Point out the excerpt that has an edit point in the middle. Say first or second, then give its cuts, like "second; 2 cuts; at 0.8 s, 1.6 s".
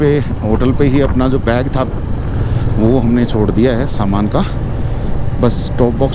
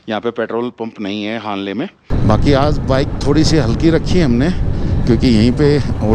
second; 1 cut; at 2.0 s